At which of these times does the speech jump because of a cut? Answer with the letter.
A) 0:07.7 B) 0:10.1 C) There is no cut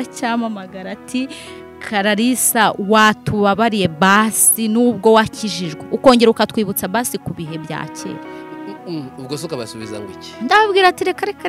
C